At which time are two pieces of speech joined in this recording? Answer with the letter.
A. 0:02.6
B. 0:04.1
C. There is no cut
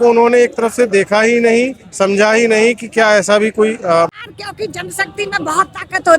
B